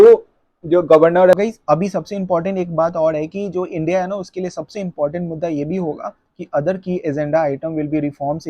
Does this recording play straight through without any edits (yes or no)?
no